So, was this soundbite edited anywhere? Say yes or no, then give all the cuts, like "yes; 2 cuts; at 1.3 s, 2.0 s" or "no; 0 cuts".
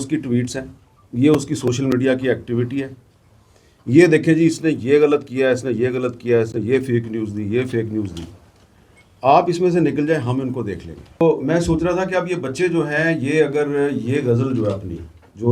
yes; 1 cut; at 11.2 s